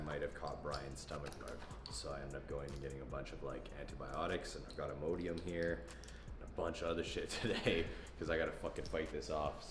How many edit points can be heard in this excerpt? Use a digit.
0